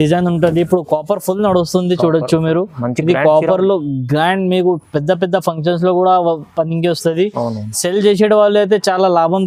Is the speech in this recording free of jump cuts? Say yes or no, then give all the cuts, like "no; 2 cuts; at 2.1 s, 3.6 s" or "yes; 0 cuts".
yes; 0 cuts